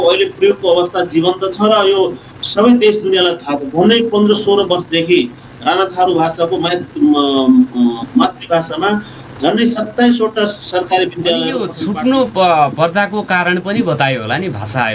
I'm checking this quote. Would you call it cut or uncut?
cut